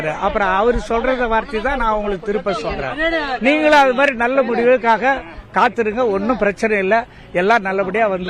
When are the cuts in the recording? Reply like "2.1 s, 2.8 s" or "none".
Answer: none